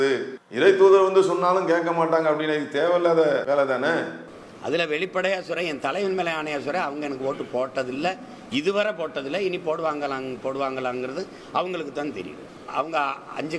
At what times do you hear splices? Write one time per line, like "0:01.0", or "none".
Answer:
none

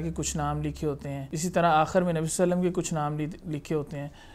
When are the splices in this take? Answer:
0:01.2

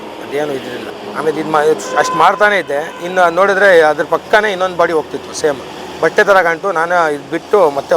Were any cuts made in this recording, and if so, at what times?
none

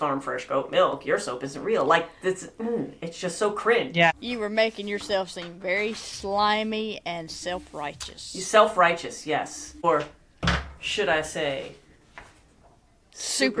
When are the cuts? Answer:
0:04.1
0:09.8

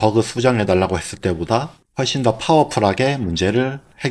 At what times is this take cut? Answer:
0:01.8

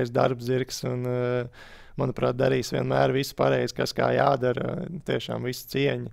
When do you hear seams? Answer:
none

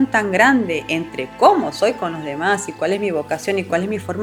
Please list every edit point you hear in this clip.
none

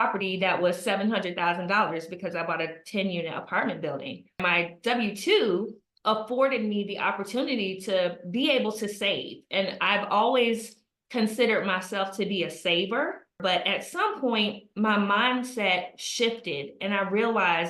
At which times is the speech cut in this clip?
0:04.4
0:13.4

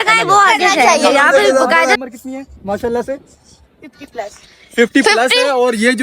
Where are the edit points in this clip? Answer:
0:02.0

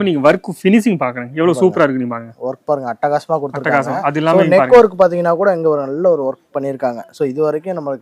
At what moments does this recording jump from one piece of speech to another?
none

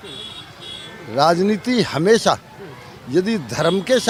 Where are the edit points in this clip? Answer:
none

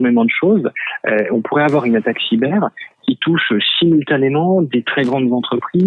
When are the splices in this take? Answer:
none

